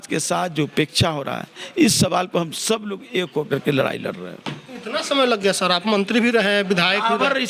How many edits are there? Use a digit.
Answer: 0